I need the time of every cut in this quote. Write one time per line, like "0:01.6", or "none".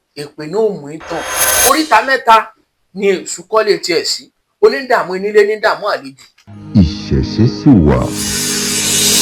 0:01.5
0:06.6